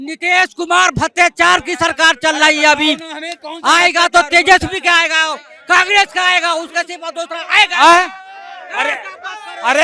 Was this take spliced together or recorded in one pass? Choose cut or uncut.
uncut